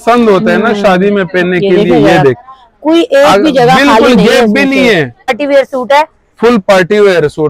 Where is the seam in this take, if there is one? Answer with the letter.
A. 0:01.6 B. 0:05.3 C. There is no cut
B